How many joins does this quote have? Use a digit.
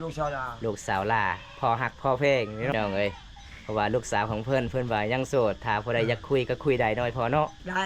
1